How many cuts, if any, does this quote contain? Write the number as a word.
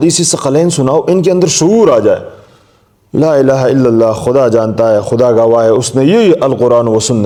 zero